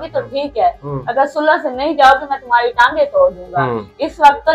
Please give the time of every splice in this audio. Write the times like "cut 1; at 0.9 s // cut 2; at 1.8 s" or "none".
none